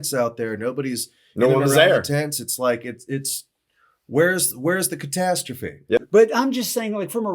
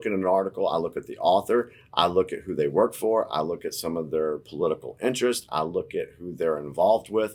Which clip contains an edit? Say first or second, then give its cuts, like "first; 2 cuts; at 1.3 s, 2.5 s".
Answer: first; 1 cut; at 6.1 s